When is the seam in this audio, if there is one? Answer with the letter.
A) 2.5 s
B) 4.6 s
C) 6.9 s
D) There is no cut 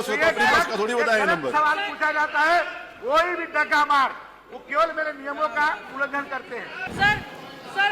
C